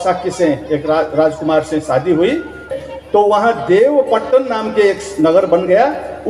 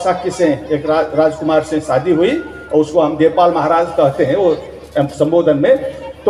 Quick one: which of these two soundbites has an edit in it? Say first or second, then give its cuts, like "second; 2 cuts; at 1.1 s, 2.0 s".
first; 1 cut; at 2.7 s